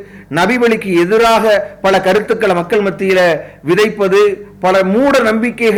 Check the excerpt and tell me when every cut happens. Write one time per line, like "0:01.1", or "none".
none